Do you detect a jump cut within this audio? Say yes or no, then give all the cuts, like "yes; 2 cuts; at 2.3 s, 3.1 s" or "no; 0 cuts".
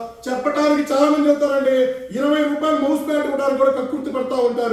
no; 0 cuts